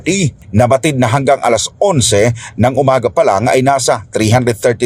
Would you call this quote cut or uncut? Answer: uncut